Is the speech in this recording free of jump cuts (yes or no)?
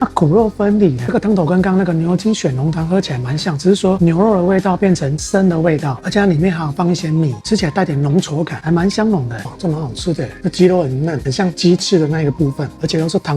no